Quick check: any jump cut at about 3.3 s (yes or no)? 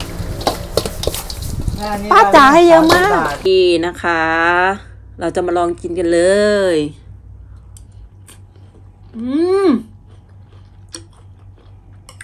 yes